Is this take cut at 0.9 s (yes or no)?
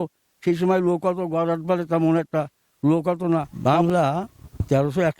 no